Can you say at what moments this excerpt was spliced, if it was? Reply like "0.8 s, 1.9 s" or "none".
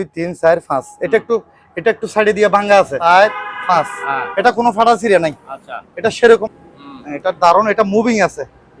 2.9 s, 6.5 s